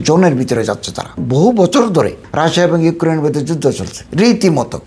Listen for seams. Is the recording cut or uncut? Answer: cut